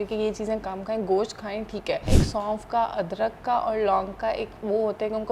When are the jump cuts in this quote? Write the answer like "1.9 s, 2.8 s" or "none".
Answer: 2.1 s